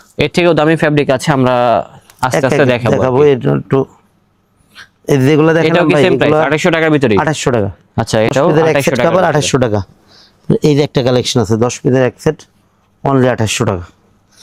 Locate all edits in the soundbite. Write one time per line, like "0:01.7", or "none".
none